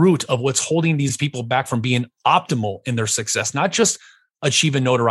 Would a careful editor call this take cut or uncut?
cut